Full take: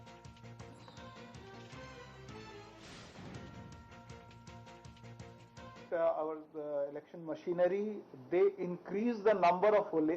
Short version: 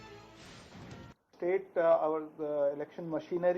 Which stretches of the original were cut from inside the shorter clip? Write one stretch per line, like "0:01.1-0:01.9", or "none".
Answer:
0:04.1-0:05.9